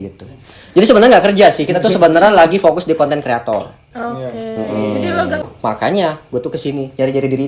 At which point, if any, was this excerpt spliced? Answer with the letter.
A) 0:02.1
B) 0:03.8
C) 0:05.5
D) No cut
C